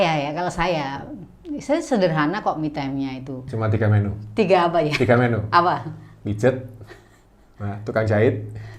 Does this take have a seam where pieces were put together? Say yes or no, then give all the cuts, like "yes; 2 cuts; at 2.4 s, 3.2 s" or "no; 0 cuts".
yes; 1 cut; at 3.4 s